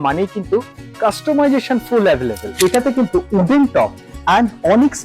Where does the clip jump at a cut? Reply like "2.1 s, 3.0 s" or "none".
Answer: 2.4 s